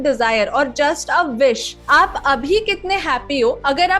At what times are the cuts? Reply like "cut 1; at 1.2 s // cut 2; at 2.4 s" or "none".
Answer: cut 1; at 1.7 s